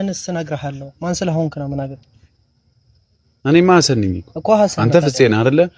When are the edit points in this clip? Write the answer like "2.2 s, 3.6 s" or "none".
none